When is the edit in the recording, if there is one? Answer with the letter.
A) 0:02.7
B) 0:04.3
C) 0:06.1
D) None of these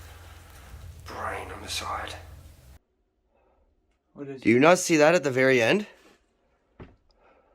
A